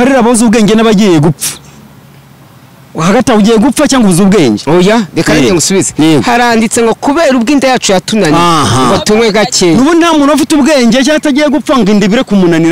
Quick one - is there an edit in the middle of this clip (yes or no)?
no